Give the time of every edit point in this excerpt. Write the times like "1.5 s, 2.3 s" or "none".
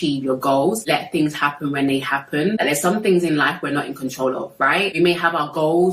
0.8 s, 2.6 s, 5.0 s